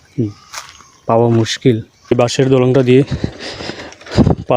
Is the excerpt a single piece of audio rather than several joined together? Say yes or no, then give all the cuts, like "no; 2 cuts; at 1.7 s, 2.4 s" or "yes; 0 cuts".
no; 1 cut; at 2.1 s